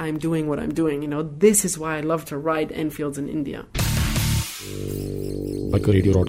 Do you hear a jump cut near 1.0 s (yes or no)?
no